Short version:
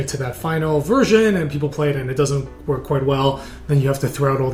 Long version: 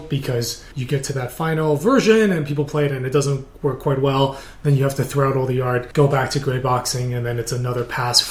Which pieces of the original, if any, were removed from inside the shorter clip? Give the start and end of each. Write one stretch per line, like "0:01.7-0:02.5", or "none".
none